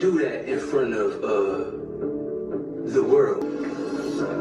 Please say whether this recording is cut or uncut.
cut